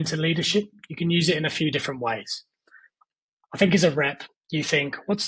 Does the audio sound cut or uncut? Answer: uncut